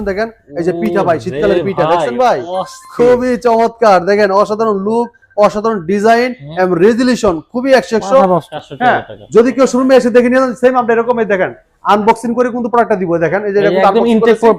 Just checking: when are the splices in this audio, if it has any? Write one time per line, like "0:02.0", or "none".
0:08.5